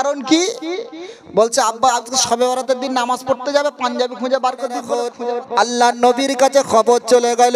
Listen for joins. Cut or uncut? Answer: cut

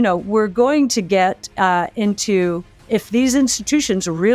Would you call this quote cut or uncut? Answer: cut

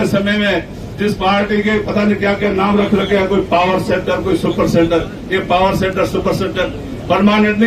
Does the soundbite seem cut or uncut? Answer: uncut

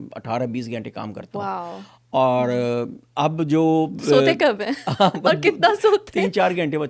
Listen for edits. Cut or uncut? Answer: uncut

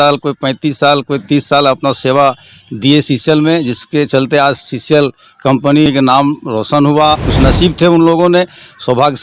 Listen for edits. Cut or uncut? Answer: cut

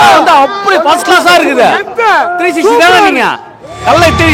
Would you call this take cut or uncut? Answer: uncut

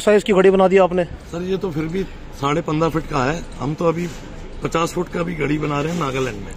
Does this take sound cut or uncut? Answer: uncut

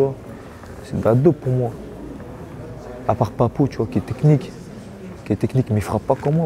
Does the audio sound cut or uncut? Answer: uncut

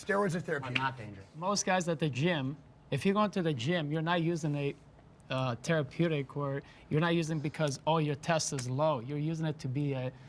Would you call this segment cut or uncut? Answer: cut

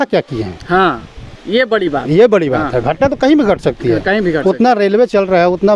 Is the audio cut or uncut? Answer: uncut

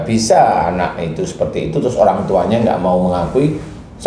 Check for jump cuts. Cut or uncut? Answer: uncut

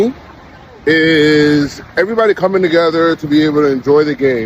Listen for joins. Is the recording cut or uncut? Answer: uncut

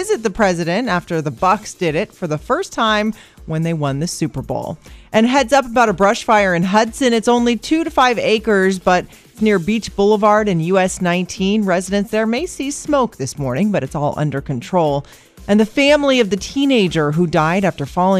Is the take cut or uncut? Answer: uncut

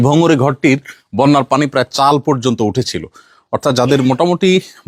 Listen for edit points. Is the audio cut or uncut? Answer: uncut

